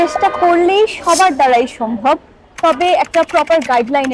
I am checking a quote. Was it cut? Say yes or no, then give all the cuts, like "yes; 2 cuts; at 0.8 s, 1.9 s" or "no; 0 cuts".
no; 0 cuts